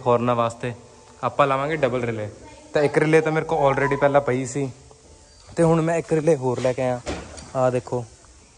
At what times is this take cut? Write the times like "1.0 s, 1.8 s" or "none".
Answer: none